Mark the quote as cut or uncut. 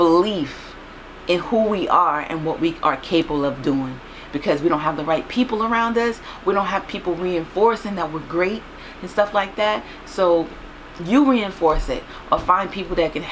uncut